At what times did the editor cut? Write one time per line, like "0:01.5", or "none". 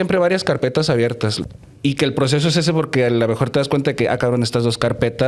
0:01.4